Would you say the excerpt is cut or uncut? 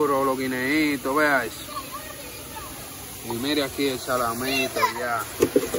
uncut